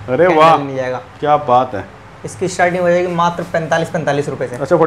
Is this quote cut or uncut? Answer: uncut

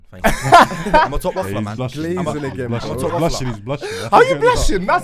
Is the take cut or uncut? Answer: uncut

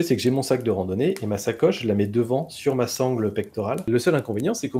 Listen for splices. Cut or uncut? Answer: cut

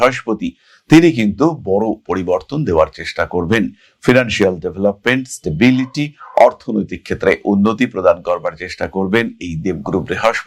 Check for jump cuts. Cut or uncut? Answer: uncut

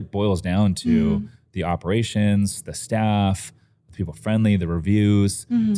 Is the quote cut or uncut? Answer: uncut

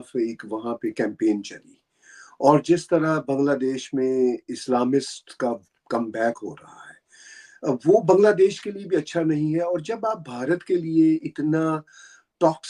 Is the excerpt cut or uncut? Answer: uncut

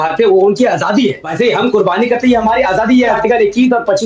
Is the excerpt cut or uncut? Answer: cut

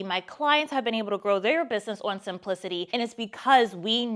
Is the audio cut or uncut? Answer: cut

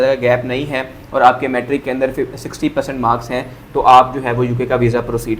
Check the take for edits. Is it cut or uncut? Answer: uncut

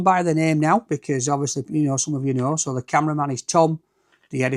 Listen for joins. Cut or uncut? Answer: uncut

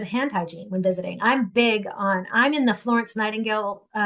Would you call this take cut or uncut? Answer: uncut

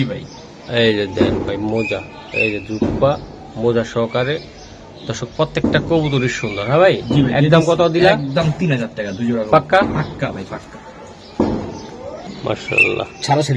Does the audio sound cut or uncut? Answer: uncut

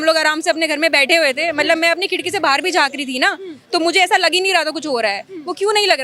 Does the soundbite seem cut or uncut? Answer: uncut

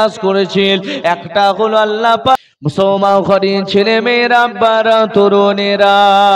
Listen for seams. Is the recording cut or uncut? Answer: cut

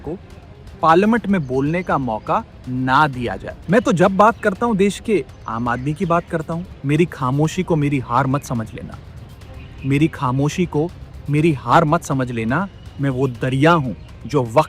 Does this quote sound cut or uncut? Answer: cut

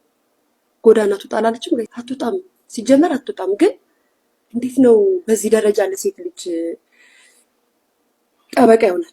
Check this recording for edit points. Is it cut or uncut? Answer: cut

